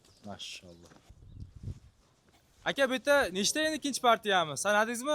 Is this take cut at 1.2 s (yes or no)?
yes